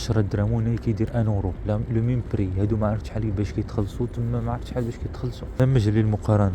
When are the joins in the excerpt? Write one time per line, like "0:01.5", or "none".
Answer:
0:05.6